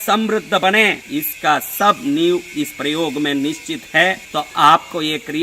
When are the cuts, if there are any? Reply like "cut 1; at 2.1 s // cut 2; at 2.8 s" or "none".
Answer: cut 1; at 1.0 s // cut 2; at 4.2 s